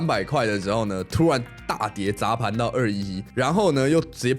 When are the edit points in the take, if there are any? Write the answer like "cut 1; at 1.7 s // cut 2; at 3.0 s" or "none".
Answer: cut 1; at 3.2 s